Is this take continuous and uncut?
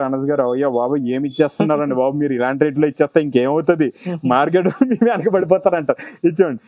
yes; 0 cuts

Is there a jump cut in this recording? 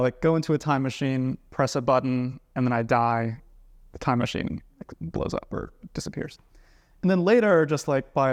no; 0 cuts

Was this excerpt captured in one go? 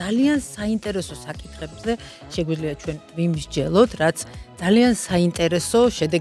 yes; 0 cuts

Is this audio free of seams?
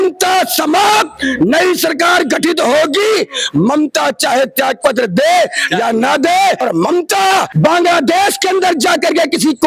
no; 2 cuts; at 6.6 s, 7.5 s

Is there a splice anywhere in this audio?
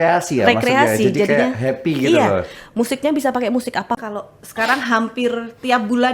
yes; 1 cut; at 4.0 s

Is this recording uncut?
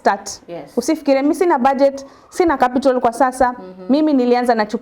yes; 0 cuts

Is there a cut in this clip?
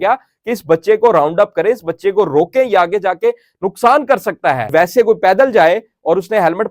yes; 1 cut; at 4.7 s

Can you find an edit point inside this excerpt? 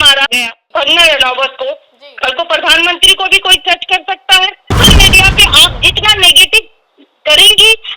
yes; 1 cut; at 4.8 s

